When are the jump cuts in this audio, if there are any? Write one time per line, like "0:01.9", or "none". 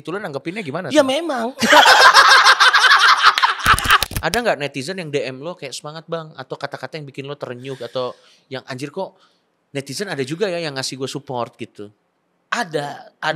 0:04.1